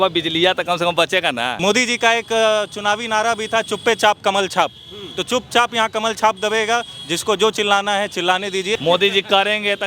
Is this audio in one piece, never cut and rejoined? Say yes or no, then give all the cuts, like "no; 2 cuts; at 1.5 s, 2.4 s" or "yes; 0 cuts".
no; 2 cuts; at 1.5 s, 8.8 s